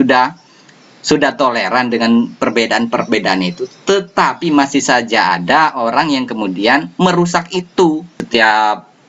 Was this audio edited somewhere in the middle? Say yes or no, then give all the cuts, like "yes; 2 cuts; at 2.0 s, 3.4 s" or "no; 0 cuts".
yes; 1 cut; at 8.1 s